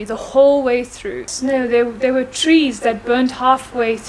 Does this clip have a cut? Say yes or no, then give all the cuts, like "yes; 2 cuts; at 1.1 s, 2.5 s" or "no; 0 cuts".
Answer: yes; 1 cut; at 1.3 s